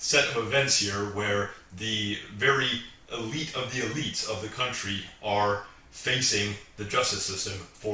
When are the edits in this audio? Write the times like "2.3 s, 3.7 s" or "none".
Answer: none

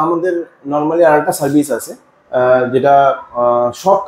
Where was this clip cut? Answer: none

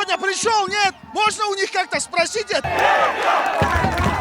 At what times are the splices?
2.6 s

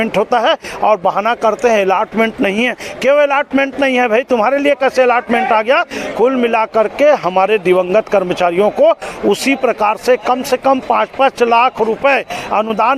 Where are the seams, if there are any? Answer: none

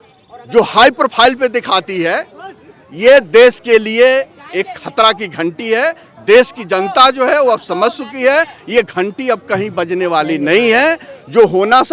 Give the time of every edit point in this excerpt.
none

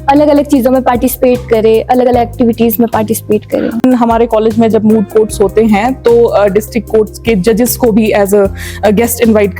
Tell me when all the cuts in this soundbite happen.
3.8 s

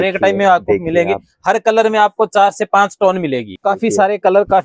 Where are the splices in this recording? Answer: 3.5 s

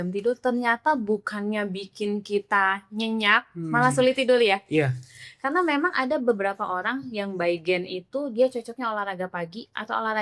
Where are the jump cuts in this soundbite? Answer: none

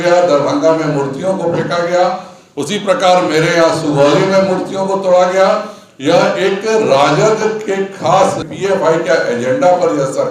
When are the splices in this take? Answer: 8.4 s

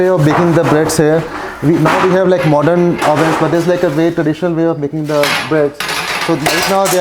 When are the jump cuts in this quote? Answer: none

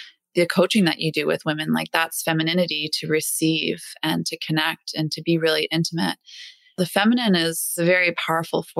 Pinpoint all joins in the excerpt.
6.7 s, 7.8 s

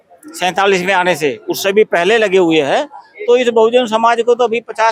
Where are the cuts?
none

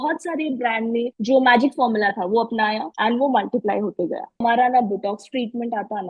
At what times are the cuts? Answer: 1.2 s, 2.9 s, 4.4 s

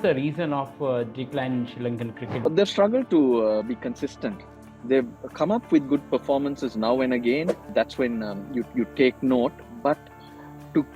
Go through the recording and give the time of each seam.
7.7 s

